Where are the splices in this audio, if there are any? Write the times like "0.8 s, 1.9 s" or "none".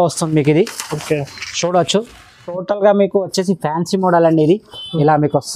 2.5 s